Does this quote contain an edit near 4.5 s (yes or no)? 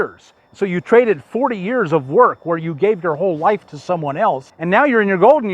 yes